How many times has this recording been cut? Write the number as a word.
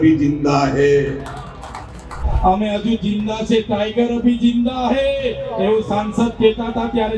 one